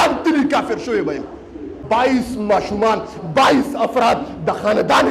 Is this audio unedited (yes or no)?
no